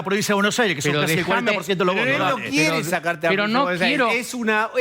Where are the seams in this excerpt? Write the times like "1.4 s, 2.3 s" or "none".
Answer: none